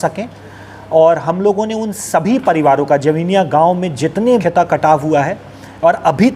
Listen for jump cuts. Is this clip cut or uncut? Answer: cut